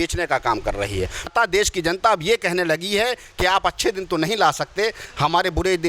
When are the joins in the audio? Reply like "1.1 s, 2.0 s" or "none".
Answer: 1.3 s